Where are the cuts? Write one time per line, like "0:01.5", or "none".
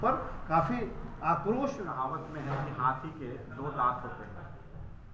0:01.9